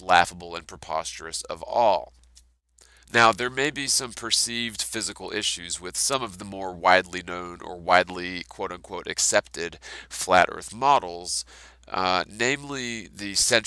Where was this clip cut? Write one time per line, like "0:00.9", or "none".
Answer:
none